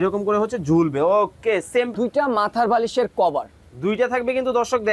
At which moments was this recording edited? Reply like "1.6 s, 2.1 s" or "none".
1.9 s